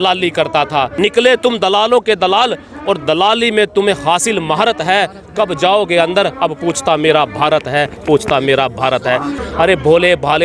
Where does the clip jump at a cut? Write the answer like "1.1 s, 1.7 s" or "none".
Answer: 0.9 s, 9.4 s